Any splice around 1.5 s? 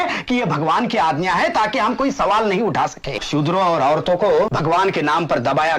no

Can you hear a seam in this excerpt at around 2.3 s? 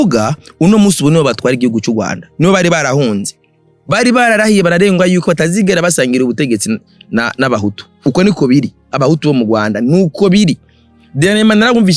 no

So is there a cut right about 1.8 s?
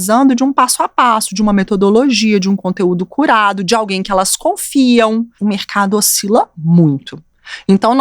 no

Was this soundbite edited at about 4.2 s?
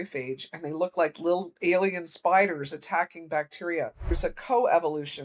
yes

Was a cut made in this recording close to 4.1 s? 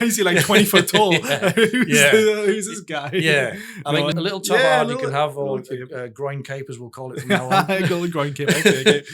yes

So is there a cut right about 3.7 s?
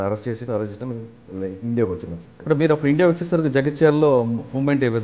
no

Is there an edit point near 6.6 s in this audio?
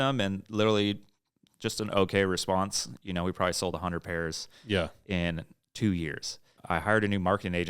yes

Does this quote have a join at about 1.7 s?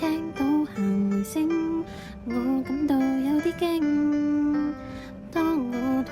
no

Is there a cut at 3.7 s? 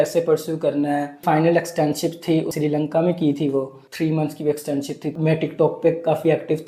no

